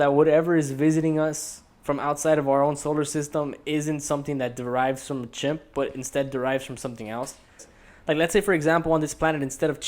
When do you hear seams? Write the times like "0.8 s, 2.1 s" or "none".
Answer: 7.7 s